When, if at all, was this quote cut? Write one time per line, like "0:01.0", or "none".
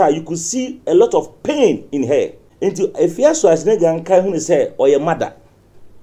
0:02.4